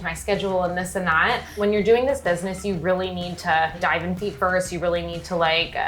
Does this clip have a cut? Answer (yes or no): yes